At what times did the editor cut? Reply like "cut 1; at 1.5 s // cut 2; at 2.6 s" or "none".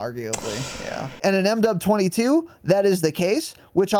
cut 1; at 1.0 s